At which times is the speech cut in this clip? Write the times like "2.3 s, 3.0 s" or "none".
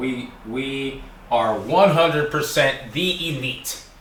none